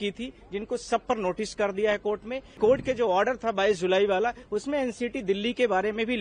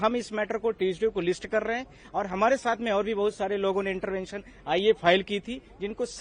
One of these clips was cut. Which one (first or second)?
first